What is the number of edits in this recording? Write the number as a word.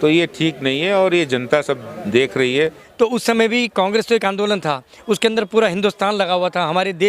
one